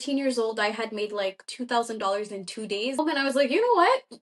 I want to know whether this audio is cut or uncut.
cut